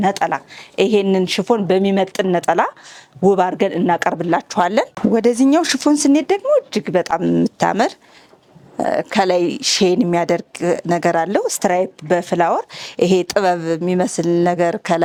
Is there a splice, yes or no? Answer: no